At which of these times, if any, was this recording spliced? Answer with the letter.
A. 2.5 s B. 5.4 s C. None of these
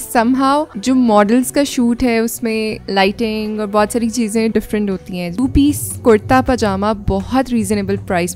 B